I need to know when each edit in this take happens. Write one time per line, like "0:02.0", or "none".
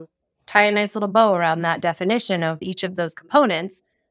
0:02.6

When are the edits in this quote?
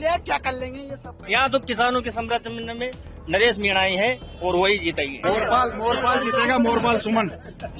0:01.1
0:05.2

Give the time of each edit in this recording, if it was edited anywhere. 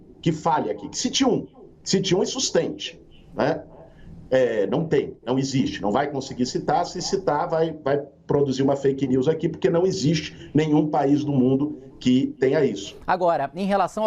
0:12.9

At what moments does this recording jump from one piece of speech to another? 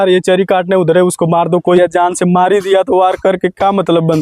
0:01.8

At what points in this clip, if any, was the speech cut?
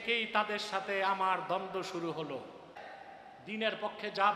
0:02.8

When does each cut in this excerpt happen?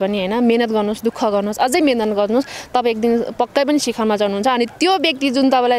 none

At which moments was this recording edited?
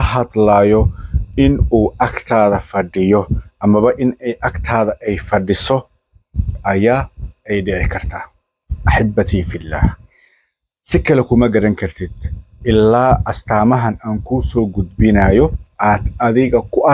0:15.6

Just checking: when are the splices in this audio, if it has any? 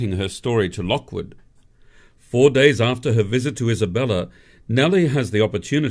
0:03.5

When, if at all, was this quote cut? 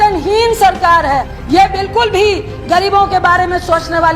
0:01.4

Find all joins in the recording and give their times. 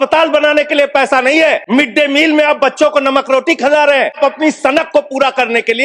0:01.6
0:04.2

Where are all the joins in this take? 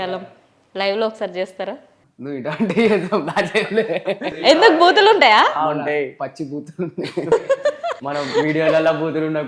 none

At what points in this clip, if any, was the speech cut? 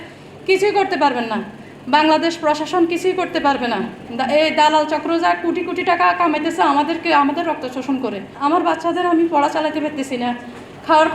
0:04.0
0:08.3

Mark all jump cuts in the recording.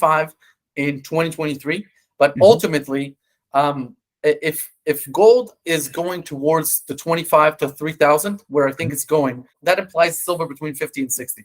0:09.5

